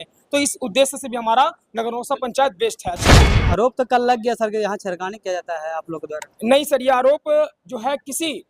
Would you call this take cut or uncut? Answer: cut